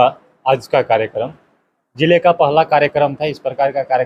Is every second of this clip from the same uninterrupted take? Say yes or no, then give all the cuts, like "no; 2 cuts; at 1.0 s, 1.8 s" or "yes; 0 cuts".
yes; 0 cuts